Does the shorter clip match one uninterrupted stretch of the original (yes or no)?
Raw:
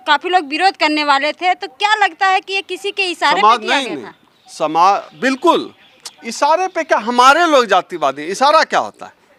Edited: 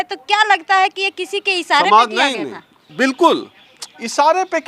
no